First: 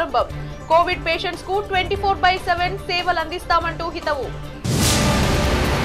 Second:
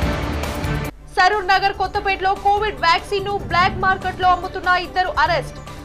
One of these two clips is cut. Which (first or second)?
second